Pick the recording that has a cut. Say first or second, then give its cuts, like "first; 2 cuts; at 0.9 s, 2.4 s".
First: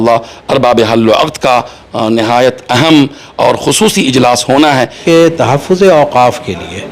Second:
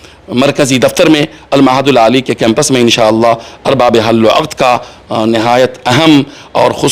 first; 1 cut; at 5.0 s